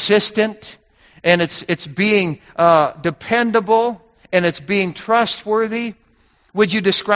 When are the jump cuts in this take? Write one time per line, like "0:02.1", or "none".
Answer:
none